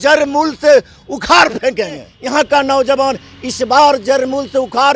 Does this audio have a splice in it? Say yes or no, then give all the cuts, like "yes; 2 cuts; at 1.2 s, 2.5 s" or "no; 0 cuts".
yes; 1 cut; at 2.1 s